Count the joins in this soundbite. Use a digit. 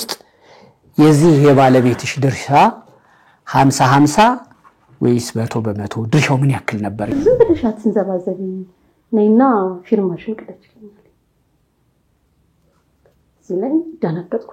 1